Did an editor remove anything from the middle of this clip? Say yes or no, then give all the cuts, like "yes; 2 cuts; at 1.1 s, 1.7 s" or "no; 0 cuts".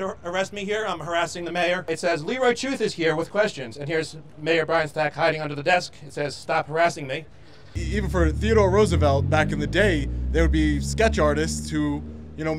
yes; 2 cuts; at 1.9 s, 7.8 s